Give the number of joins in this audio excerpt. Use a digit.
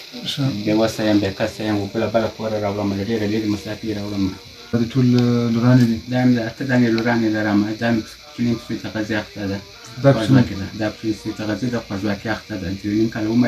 1